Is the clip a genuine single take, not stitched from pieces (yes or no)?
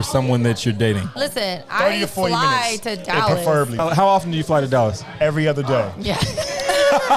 no